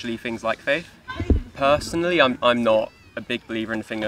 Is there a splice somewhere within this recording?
yes; 1 cut; at 1.0 s

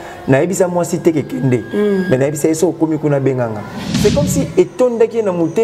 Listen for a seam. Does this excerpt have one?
yes; 1 cut; at 3.8 s

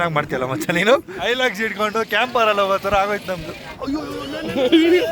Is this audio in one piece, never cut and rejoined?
no; 2 cuts; at 1.1 s, 3.7 s

